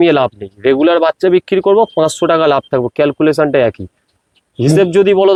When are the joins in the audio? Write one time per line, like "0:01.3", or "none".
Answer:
none